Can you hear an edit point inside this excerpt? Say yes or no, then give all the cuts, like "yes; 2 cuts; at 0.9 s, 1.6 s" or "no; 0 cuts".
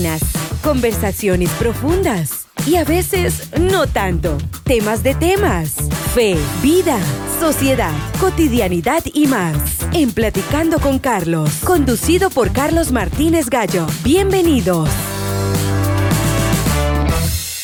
no; 0 cuts